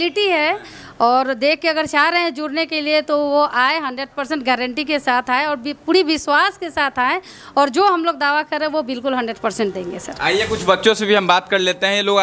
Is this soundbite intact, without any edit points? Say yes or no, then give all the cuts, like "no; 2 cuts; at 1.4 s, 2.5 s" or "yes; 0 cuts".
yes; 0 cuts